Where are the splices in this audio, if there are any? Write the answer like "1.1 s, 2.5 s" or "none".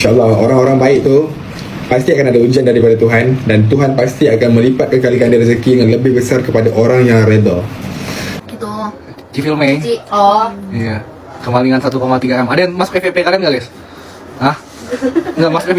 8.4 s